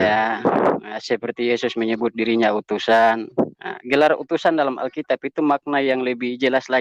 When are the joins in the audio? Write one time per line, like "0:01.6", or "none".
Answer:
none